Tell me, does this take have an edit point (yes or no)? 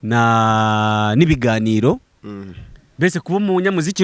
no